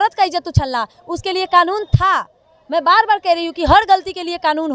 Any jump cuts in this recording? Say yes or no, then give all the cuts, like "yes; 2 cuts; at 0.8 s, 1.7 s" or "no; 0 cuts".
no; 0 cuts